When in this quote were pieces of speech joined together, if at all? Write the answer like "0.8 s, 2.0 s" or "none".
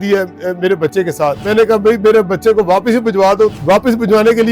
1.4 s, 3.5 s